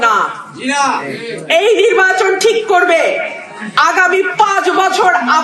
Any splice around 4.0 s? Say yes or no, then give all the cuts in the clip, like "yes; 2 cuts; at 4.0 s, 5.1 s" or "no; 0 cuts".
no; 0 cuts